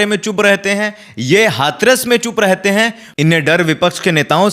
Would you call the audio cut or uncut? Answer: cut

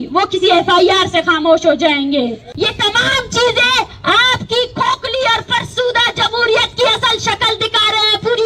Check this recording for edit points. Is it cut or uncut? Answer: cut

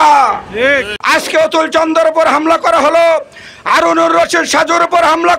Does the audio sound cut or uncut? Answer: cut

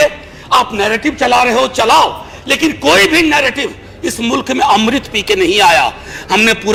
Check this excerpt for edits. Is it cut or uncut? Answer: uncut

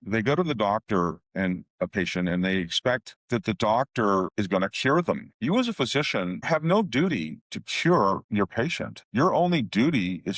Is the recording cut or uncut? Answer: uncut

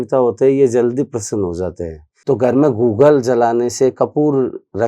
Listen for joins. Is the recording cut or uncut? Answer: cut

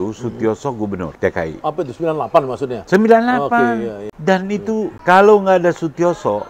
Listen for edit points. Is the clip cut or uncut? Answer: cut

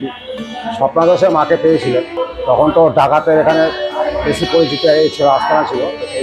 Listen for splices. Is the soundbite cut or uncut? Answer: cut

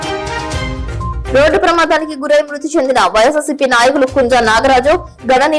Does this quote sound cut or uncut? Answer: cut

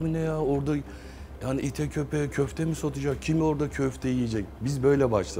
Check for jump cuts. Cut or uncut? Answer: uncut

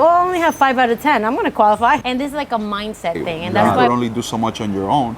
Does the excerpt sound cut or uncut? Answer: cut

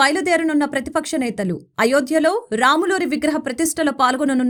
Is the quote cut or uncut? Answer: uncut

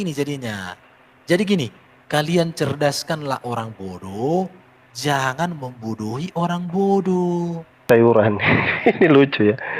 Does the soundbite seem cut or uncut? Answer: cut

